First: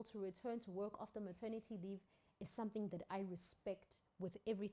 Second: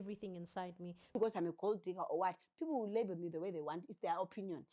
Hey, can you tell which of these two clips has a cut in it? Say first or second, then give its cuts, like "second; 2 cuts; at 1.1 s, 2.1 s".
second; 1 cut; at 1.1 s